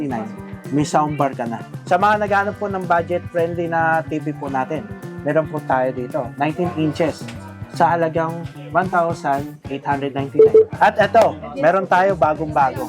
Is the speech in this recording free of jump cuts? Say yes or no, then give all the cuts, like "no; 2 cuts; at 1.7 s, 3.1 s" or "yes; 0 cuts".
no; 2 cuts; at 1.7 s, 10.7 s